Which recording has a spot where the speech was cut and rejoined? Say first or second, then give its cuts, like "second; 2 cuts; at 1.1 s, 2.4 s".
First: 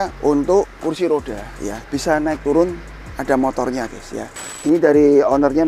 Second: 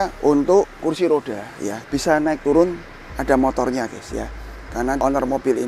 first; 1 cut; at 4.5 s